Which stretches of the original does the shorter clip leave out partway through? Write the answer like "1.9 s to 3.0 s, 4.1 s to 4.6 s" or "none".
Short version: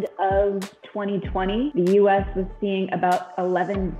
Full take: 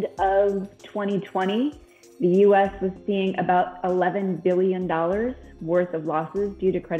1.7 s to 2.2 s